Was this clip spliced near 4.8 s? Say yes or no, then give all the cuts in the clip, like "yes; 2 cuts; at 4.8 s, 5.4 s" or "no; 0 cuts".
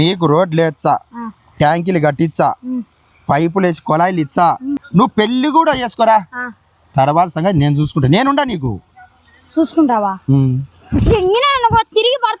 yes; 1 cut; at 4.8 s